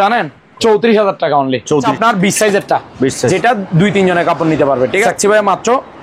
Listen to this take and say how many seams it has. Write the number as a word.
two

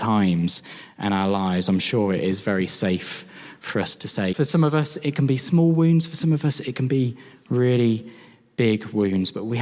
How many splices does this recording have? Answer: one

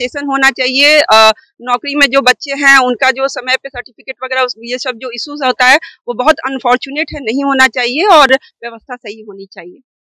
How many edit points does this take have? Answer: zero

